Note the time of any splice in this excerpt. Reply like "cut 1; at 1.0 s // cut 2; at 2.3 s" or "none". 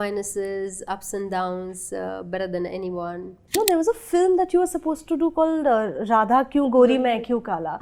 cut 1; at 3.5 s